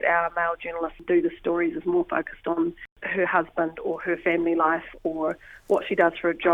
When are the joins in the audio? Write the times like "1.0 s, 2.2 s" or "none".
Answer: 1.0 s, 3.0 s

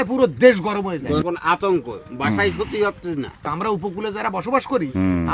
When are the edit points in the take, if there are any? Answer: 1.2 s, 3.4 s

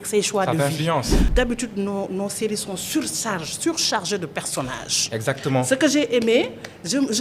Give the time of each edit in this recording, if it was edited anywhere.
1.2 s

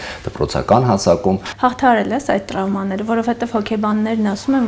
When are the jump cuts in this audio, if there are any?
1.5 s

